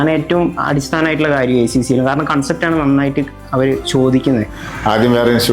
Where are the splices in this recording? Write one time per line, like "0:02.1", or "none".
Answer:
0:04.6

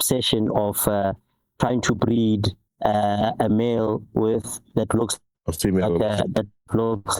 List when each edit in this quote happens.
0:02.6
0:05.6

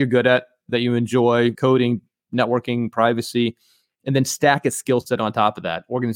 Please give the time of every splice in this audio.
0:01.6

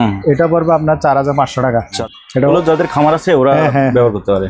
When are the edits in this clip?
0:01.9

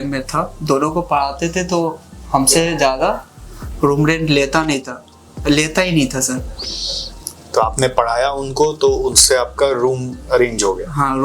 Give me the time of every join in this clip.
none

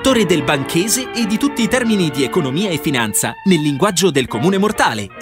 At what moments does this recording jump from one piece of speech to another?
none

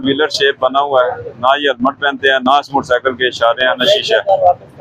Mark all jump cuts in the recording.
none

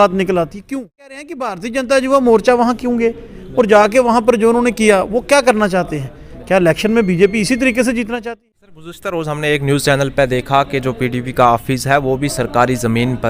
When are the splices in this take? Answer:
0:01.1
0:08.4

